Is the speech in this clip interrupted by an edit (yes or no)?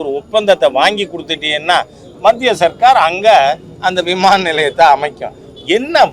no